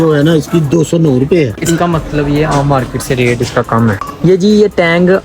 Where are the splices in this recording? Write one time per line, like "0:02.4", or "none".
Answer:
0:01.6
0:04.0